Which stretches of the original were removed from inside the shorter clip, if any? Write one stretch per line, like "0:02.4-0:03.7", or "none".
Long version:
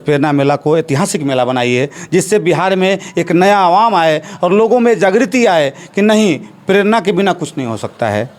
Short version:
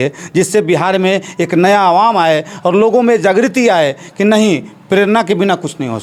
none